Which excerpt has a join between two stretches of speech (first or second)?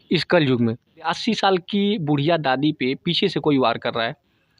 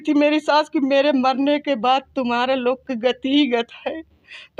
first